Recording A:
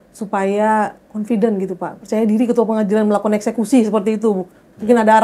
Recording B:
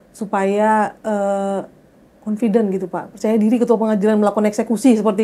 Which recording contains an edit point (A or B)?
A